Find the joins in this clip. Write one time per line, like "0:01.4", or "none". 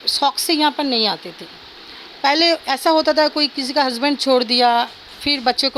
none